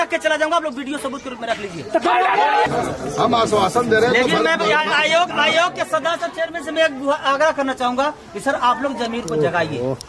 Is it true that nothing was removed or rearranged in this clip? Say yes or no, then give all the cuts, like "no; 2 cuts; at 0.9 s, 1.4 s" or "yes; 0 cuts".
no; 1 cut; at 2.7 s